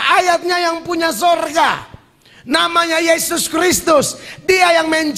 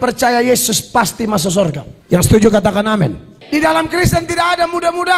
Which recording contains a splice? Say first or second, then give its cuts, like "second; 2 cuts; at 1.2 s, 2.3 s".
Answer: second; 2 cuts; at 1.9 s, 3.3 s